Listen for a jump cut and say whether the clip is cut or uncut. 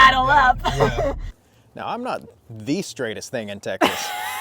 cut